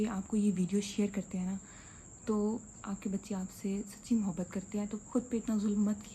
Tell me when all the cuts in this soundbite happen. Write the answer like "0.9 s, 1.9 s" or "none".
5.0 s